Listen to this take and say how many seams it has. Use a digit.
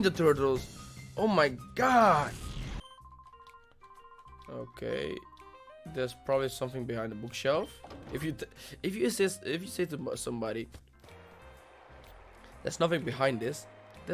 0